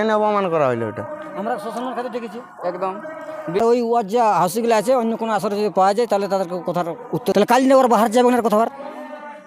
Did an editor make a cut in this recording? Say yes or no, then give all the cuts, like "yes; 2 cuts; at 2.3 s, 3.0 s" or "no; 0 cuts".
yes; 2 cuts; at 3.6 s, 7.3 s